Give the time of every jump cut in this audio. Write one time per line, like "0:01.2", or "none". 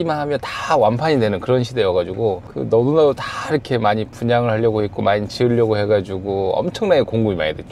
none